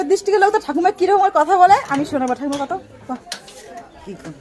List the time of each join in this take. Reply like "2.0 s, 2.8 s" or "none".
none